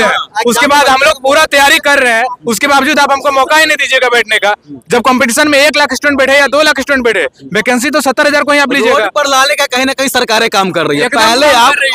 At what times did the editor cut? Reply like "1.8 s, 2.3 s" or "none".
none